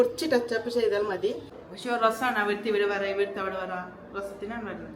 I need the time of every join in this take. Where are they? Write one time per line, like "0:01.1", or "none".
0:01.5